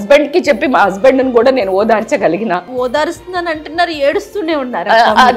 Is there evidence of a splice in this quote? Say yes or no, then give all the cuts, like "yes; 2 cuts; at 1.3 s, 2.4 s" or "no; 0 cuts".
yes; 1 cut; at 2.7 s